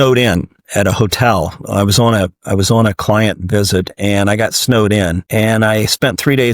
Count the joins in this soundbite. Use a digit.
1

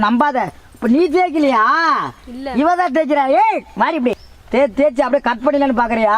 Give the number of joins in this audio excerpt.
1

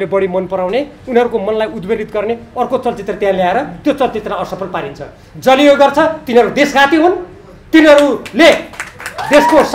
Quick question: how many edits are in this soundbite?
0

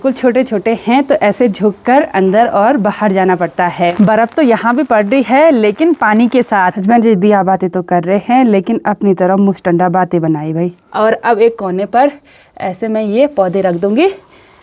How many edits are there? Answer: 3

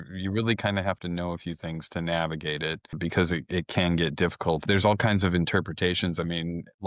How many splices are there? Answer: 2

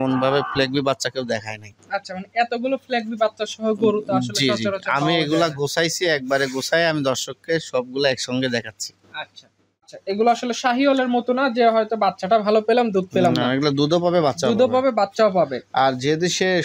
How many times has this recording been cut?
1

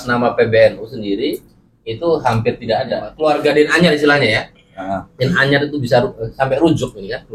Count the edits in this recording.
1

